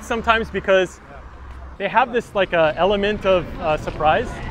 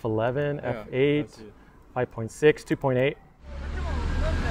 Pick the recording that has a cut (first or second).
second